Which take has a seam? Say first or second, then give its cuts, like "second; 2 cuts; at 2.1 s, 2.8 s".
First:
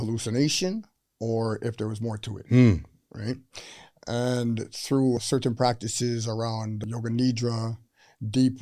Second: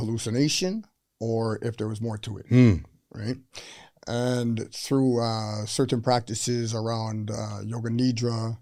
first; 2 cuts; at 5.2 s, 6.8 s